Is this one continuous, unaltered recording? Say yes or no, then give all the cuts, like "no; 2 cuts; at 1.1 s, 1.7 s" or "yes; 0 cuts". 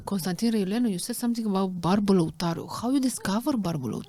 yes; 0 cuts